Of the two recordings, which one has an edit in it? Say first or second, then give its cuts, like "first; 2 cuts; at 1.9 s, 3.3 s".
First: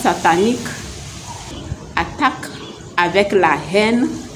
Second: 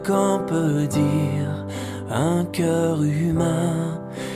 first; 1 cut; at 1.5 s